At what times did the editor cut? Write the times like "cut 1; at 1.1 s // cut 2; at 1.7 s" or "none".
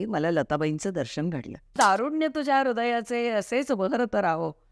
cut 1; at 1.8 s